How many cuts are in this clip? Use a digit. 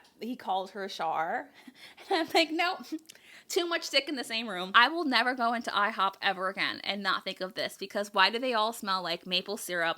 1